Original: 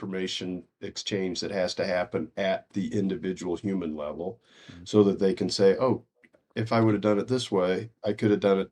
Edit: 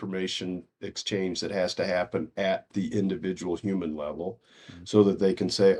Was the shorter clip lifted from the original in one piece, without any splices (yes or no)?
yes